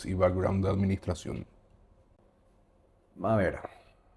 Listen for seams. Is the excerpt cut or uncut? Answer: uncut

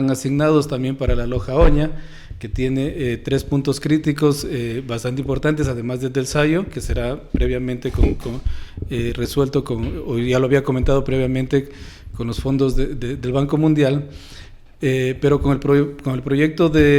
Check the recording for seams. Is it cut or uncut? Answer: uncut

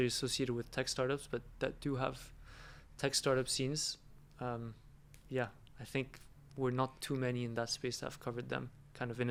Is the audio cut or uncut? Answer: uncut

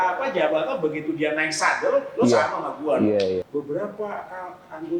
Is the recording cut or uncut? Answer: cut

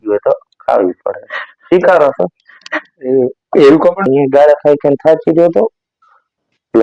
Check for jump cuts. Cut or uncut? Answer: cut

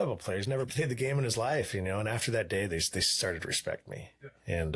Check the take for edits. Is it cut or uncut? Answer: uncut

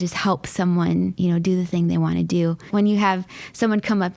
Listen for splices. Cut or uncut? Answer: cut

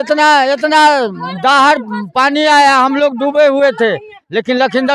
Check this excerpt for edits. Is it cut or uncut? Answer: uncut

